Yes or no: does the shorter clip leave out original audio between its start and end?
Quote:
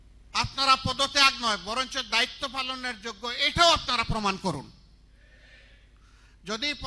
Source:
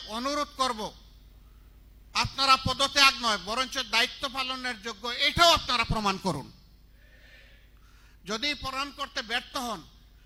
no